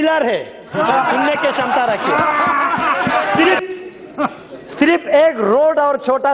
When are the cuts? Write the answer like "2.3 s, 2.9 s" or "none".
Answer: 3.4 s